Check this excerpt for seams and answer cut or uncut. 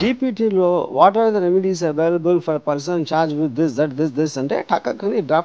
uncut